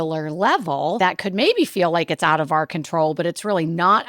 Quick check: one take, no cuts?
no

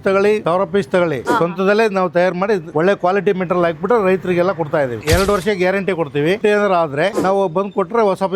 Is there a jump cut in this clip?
yes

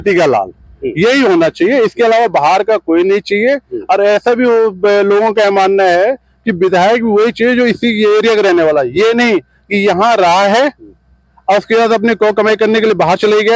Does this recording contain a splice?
no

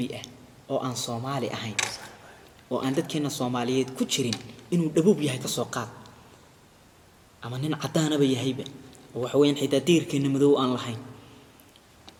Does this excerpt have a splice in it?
no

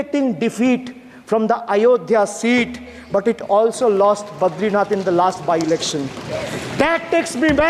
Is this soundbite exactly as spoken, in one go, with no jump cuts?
yes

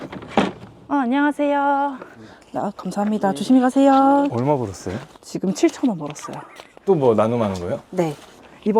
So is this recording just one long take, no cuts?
yes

